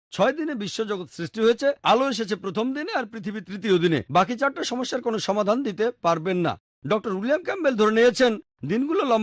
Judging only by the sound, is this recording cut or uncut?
uncut